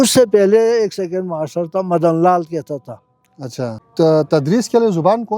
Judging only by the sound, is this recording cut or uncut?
cut